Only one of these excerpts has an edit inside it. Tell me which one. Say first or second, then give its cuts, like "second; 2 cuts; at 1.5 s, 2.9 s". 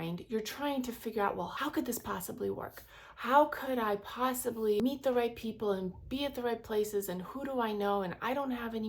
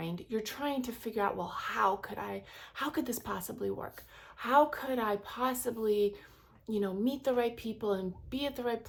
first; 2 cuts; at 1.5 s, 4.8 s